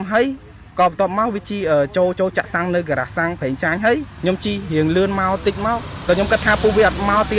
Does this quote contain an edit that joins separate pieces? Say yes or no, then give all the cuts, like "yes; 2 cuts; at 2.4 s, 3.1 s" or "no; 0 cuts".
yes; 2 cuts; at 4.1 s, 5.9 s